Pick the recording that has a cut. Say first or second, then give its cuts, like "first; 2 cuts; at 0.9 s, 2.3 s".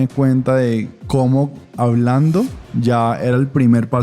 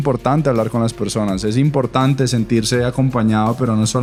first; 2 cuts; at 1.0 s, 2.6 s